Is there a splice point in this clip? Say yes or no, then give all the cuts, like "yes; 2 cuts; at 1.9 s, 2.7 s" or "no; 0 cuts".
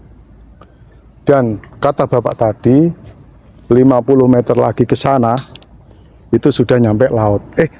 no; 0 cuts